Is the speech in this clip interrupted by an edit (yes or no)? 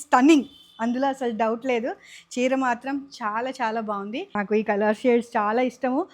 yes